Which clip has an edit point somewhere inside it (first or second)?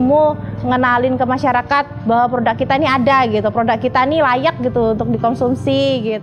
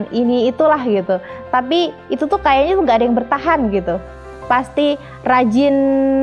second